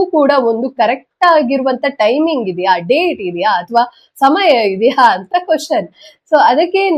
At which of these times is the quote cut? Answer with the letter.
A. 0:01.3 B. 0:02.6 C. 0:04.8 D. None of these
D